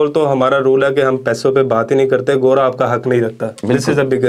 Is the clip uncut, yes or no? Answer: yes